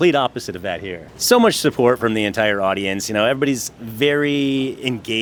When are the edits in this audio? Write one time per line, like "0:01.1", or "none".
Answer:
none